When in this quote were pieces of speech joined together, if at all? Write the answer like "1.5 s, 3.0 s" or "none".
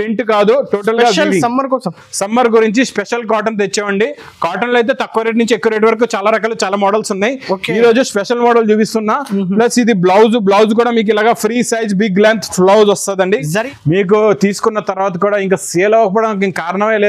13.6 s